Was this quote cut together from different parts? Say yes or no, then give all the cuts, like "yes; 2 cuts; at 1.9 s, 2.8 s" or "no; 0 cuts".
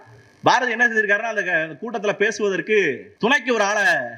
yes; 1 cut; at 3.1 s